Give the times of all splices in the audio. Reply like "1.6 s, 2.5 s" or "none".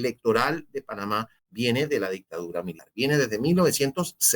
1.4 s, 2.8 s